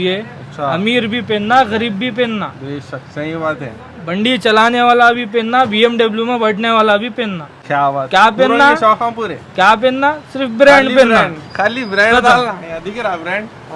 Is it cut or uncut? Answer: uncut